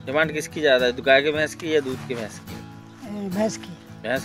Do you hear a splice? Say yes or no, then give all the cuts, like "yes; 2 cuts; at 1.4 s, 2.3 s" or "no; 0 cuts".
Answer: no; 0 cuts